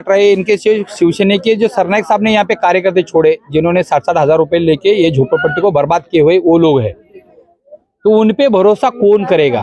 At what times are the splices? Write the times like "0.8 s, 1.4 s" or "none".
none